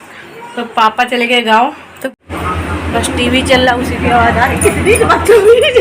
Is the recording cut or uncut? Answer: cut